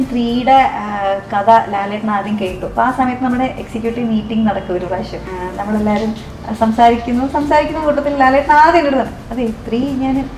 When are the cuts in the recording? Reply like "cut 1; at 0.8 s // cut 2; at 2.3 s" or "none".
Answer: cut 1; at 5.2 s